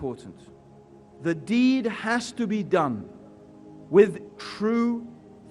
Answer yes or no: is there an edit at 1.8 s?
no